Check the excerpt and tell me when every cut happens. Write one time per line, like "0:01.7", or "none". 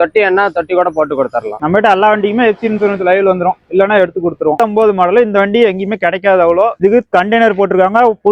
0:01.6
0:04.6